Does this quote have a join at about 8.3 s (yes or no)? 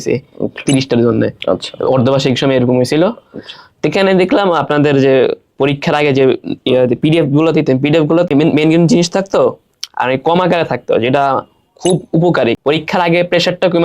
yes